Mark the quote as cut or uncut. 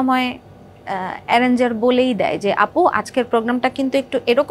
uncut